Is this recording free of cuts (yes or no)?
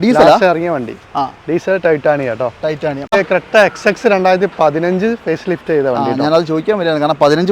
no